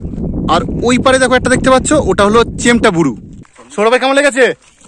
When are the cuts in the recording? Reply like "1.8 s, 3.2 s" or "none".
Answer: 3.9 s